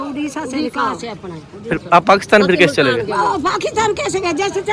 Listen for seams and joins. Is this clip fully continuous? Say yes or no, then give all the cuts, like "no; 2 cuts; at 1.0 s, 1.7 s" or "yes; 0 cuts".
yes; 0 cuts